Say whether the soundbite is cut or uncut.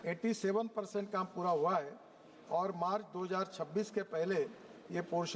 uncut